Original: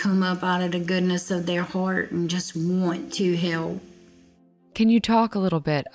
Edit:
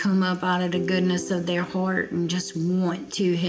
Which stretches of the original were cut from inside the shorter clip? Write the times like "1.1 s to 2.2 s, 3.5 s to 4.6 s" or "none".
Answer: none

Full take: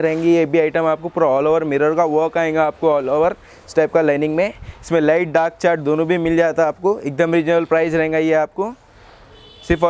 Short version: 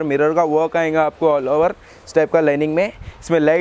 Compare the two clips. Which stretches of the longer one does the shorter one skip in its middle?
none

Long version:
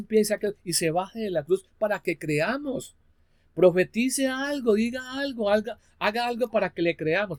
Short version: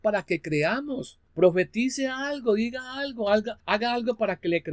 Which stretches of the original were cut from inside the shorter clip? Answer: 2.9 s to 3.4 s, 5.8 s to 5.9 s

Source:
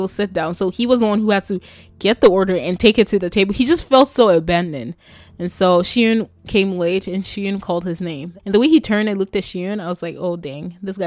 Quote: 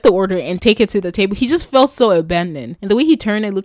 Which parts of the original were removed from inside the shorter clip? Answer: 4.8 s to 8.3 s

